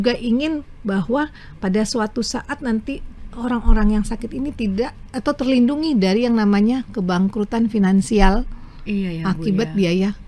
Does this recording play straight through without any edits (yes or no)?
yes